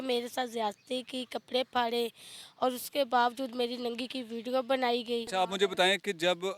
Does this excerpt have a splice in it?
yes; 1 cut; at 5.3 s

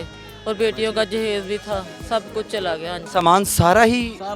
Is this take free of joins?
no; 1 cut; at 3.1 s

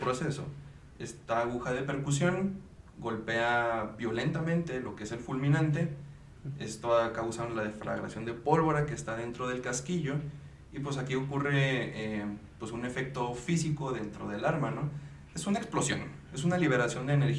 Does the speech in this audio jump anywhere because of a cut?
no; 0 cuts

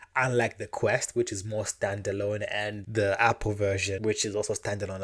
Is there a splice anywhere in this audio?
yes; 2 cuts; at 2.8 s, 4.0 s

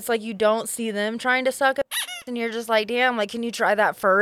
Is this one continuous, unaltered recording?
yes; 0 cuts

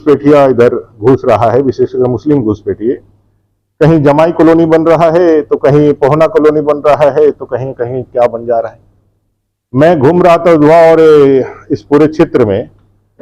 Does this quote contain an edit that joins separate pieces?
no; 0 cuts

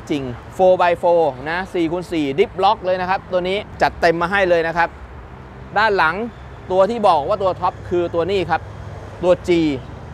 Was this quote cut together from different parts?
no; 0 cuts

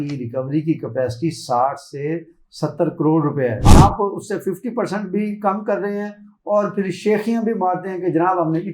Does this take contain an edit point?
yes; 1 cut; at 3.6 s

